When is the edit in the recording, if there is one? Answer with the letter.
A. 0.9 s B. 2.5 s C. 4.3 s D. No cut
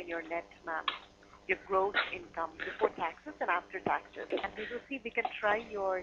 C